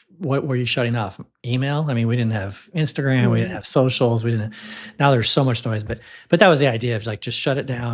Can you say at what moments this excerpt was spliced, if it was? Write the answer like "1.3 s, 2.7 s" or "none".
none

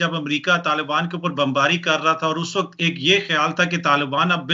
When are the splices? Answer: none

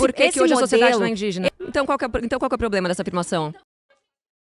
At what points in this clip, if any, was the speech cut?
1.5 s

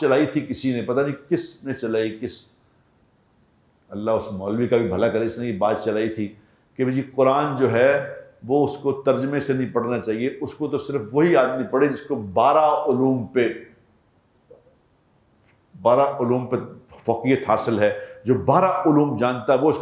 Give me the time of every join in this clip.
none

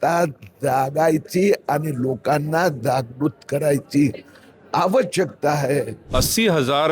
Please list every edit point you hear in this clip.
6.0 s

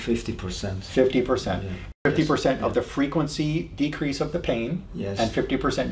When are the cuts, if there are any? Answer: 1.9 s

